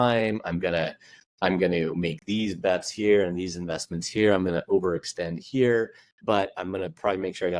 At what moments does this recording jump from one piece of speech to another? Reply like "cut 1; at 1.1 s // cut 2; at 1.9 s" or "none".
none